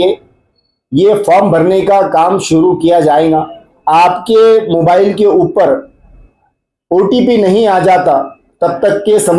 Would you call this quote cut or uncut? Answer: cut